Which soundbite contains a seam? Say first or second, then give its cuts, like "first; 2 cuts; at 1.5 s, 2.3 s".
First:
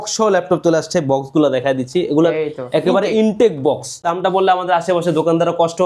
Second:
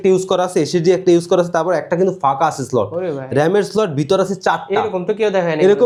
first; 1 cut; at 4.1 s